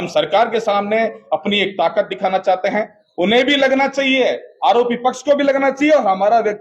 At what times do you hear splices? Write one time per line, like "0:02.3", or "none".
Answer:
none